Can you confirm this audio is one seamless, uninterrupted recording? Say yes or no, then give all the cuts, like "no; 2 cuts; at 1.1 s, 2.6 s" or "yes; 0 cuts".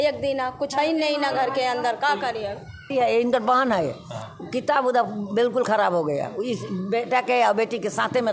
no; 1 cut; at 2.9 s